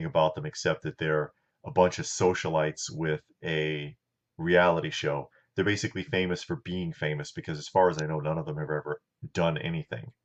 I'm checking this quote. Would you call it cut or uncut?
uncut